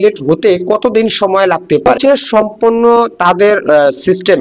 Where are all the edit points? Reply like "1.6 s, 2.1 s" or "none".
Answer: 2.0 s